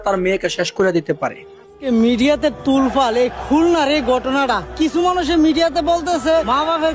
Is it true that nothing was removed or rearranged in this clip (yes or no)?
no